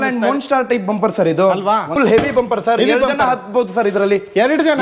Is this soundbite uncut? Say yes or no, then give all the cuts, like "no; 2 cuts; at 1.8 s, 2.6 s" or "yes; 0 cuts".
no; 1 cut; at 1.9 s